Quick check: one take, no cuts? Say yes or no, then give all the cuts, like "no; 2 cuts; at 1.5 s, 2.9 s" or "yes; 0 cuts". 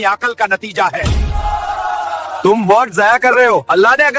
no; 1 cut; at 0.9 s